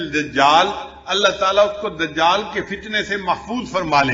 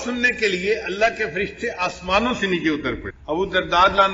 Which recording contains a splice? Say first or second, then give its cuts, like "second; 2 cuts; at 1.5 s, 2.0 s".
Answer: second; 1 cut; at 3.1 s